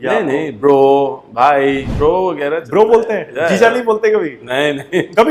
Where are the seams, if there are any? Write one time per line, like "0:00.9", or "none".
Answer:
0:01.9